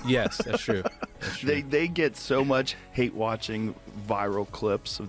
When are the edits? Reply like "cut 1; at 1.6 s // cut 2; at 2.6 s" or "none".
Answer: cut 1; at 2.7 s